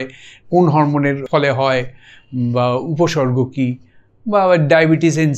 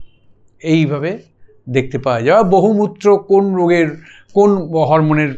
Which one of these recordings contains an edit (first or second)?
first